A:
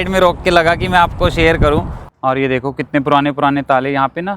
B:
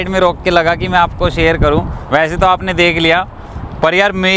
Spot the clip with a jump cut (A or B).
A